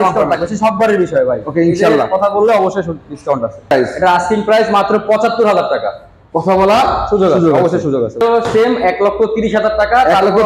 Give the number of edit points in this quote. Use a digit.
2